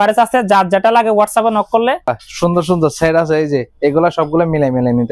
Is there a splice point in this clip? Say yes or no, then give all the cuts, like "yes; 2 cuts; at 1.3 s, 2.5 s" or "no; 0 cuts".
yes; 1 cut; at 2.1 s